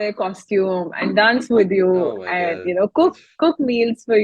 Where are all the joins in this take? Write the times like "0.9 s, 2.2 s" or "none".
none